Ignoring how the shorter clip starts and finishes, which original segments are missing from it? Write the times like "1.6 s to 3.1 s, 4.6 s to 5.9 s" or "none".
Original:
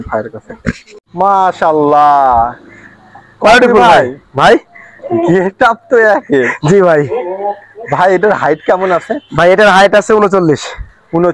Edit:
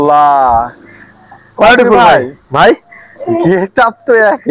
none